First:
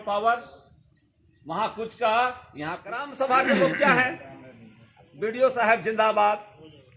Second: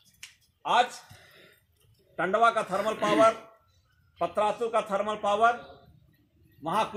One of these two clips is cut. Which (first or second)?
first